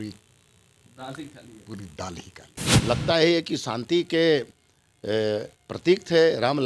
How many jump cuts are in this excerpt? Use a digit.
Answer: 1